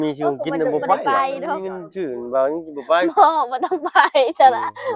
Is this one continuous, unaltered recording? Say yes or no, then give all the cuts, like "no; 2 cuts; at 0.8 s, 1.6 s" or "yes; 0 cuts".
no; 1 cut; at 1.8 s